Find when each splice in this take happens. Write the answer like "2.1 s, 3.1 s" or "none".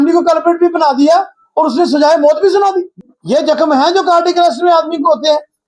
2.9 s